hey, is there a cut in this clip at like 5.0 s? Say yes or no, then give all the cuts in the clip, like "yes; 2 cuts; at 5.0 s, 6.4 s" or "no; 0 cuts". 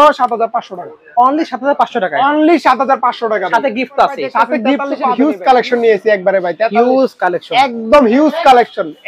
yes; 1 cut; at 5.0 s